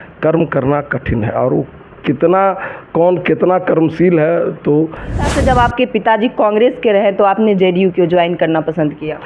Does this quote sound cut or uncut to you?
cut